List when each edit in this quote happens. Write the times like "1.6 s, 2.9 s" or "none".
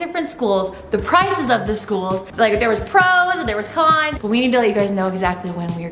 4.2 s

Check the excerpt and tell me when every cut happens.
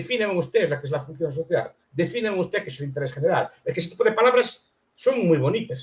none

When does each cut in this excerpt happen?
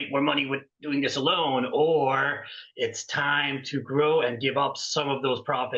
none

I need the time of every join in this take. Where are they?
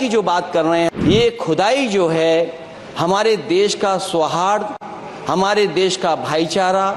0.9 s

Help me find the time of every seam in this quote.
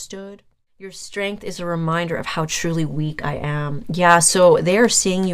1.0 s

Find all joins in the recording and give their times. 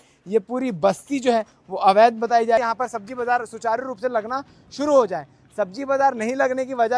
2.6 s

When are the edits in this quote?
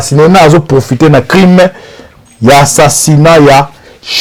none

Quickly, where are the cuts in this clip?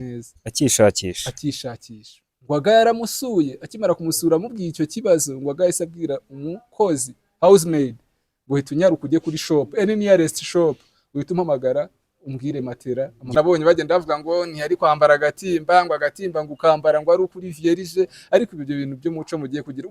13.3 s

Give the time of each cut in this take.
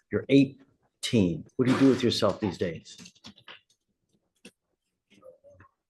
1.4 s

